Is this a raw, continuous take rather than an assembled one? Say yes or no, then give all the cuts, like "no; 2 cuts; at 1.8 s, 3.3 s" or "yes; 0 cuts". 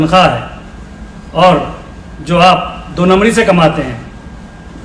yes; 0 cuts